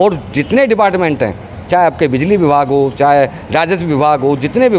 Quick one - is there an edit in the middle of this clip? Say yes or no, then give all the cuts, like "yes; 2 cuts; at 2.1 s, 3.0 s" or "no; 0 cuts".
no; 0 cuts